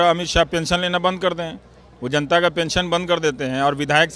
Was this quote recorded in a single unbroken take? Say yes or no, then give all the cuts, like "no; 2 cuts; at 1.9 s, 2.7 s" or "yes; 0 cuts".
yes; 0 cuts